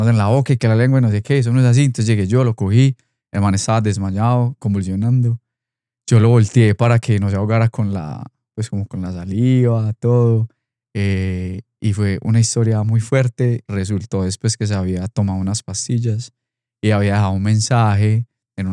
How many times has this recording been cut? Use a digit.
1